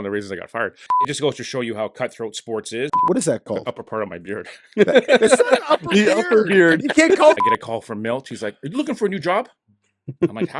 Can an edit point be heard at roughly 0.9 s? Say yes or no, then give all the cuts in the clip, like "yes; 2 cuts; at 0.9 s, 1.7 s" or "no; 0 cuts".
yes; 3 cuts; at 0.9 s, 2.9 s, 7.4 s